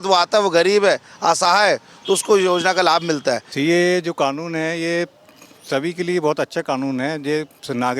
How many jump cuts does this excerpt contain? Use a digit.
1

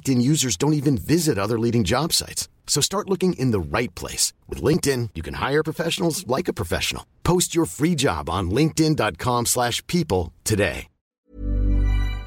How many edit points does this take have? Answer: 1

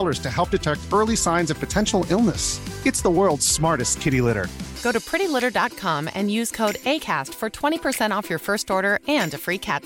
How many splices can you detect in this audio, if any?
0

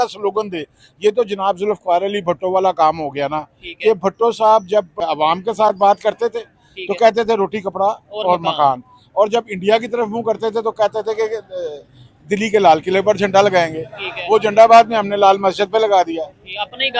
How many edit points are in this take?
1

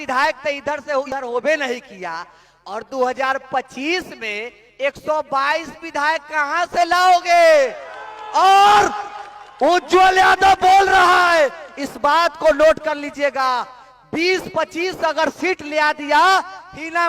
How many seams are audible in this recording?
1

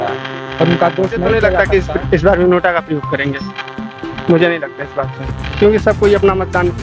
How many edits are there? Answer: 1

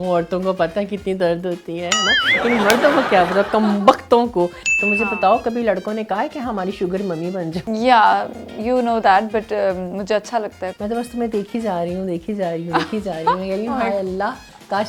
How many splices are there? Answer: 3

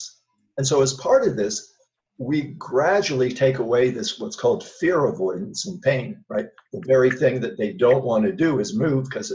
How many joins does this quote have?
0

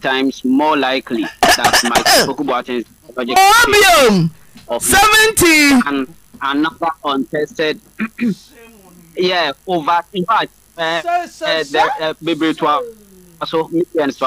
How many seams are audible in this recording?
0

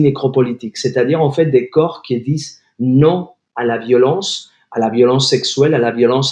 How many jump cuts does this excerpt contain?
0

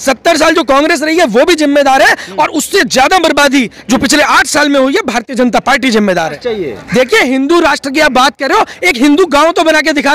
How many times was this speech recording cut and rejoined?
1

